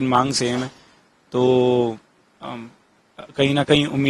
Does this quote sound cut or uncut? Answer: uncut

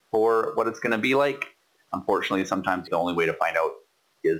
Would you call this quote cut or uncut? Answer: cut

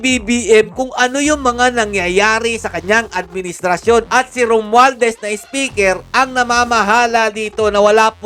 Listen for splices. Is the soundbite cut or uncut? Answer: uncut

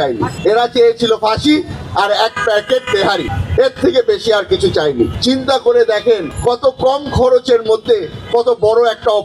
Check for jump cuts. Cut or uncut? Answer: uncut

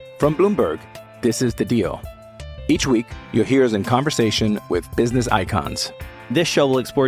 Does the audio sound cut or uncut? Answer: uncut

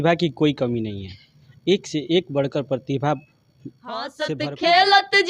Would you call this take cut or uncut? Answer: cut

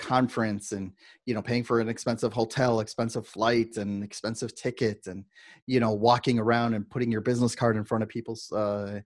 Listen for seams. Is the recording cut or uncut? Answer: uncut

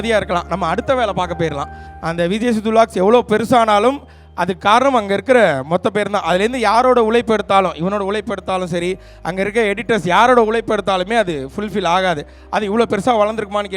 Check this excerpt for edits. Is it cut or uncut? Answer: cut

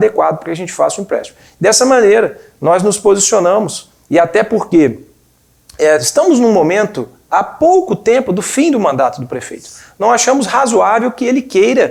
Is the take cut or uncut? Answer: uncut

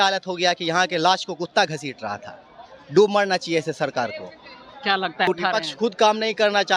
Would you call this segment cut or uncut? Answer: cut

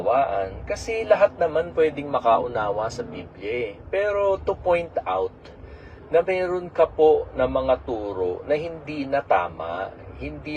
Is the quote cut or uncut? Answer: uncut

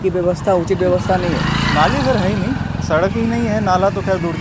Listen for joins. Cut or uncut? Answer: uncut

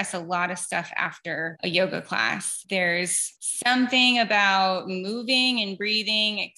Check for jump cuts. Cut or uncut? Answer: uncut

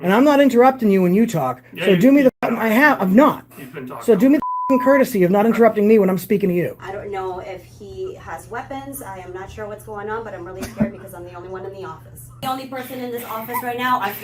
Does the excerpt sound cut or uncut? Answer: cut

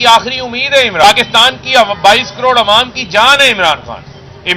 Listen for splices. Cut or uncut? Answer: cut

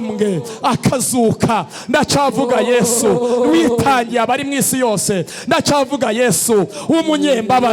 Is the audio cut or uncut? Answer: uncut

